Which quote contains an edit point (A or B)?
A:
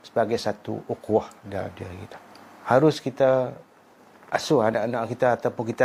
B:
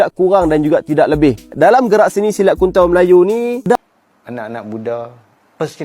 B